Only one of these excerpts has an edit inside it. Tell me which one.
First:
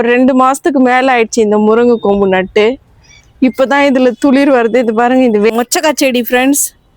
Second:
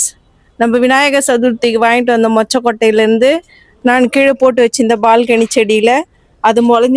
first; 1 cut; at 5.5 s

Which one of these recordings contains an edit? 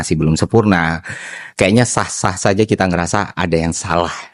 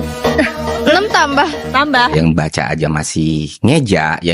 second; 1 cut; at 2.1 s

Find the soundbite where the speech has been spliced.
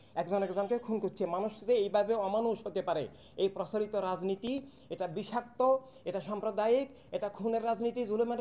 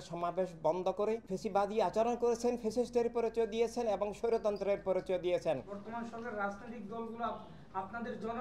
second; 2 cuts; at 1.3 s, 5.8 s

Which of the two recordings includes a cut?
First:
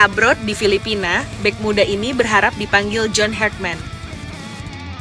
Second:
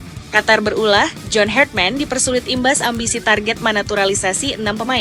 first; 1 cut; at 3.9 s

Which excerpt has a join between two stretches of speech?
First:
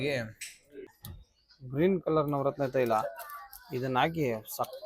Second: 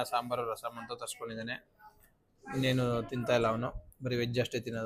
first; 1 cut; at 1.0 s

